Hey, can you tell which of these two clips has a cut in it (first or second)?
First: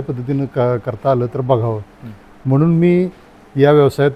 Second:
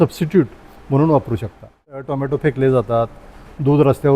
second